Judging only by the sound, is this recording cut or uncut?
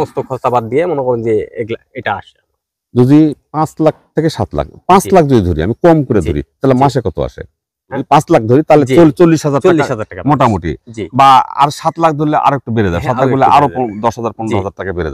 uncut